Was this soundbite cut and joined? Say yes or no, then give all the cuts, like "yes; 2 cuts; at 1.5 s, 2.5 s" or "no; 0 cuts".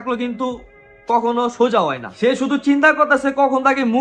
yes; 1 cut; at 2.1 s